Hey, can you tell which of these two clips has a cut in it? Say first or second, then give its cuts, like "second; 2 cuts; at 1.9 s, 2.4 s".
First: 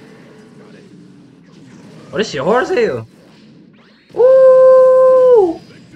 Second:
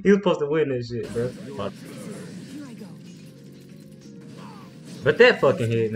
second; 1 cut; at 1.7 s